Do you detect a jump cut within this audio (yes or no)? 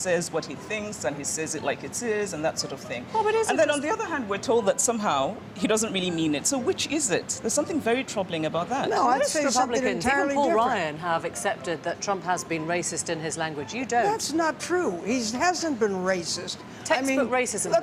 no